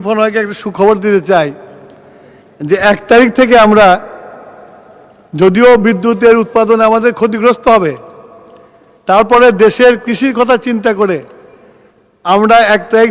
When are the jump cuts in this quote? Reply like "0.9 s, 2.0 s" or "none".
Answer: none